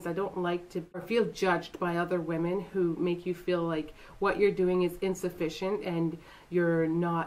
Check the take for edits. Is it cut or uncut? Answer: cut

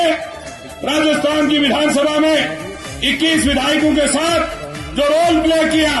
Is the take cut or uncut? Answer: uncut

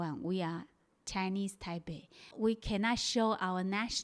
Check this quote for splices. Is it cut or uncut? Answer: cut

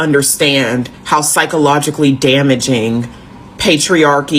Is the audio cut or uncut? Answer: uncut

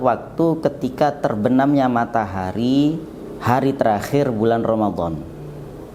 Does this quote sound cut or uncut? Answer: uncut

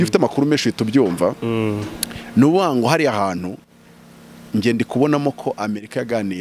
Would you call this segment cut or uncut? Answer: uncut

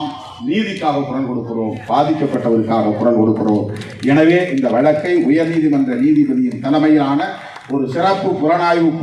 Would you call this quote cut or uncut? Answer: uncut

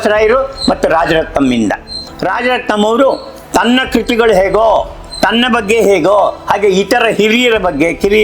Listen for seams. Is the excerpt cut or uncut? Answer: cut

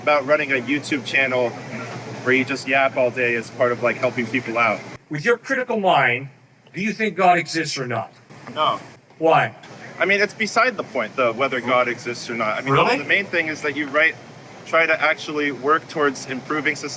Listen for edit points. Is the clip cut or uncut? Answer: cut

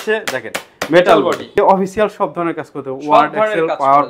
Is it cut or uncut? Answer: cut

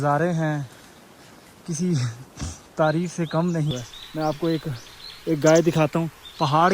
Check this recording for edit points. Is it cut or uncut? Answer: cut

